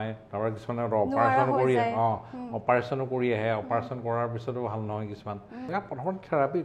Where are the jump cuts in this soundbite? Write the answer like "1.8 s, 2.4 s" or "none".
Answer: 5.7 s